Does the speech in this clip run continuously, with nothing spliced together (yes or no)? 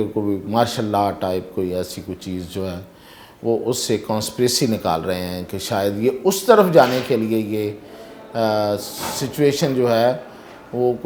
yes